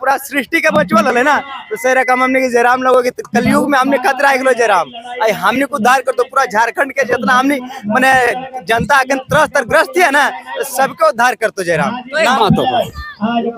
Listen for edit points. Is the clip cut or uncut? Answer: cut